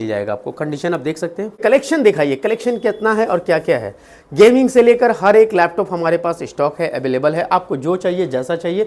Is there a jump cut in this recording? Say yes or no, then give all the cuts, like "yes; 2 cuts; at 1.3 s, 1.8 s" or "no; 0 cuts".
yes; 1 cut; at 1.6 s